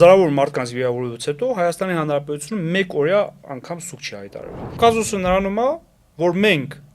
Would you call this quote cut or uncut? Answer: cut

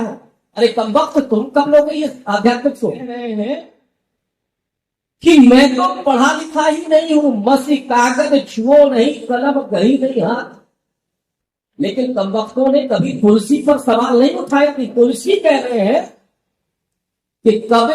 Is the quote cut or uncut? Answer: cut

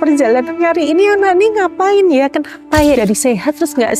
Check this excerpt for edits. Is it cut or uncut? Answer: cut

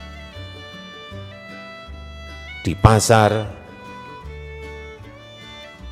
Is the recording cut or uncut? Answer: cut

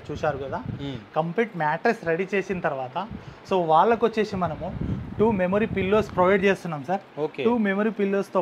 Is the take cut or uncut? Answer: uncut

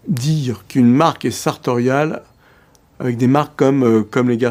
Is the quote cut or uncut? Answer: uncut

